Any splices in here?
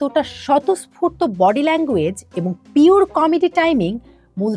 no; 0 cuts

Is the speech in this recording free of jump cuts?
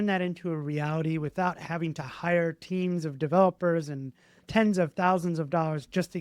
yes; 0 cuts

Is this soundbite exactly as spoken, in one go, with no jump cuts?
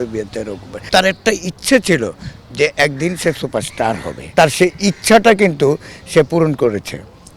no; 2 cuts; at 0.9 s, 4.3 s

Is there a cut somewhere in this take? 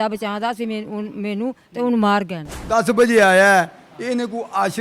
yes; 1 cut; at 2.7 s

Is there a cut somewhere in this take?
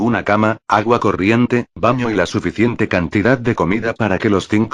no; 0 cuts

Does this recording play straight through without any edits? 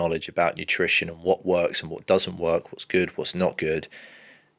yes; 0 cuts

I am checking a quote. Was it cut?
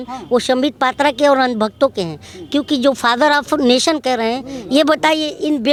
no; 0 cuts

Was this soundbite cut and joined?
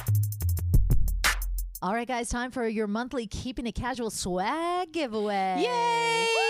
no; 0 cuts

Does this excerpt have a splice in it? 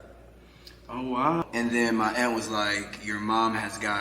yes; 1 cut; at 1.4 s

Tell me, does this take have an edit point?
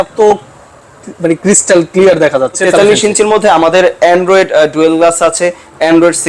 yes; 1 cut; at 2.6 s

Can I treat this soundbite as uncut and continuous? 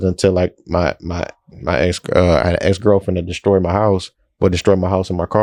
yes; 0 cuts

